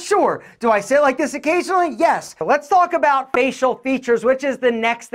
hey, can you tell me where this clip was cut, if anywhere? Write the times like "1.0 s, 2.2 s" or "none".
2.3 s